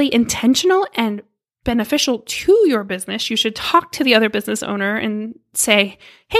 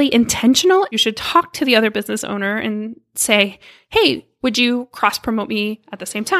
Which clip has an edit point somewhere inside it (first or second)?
second